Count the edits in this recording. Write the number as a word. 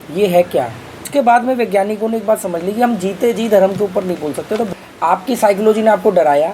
two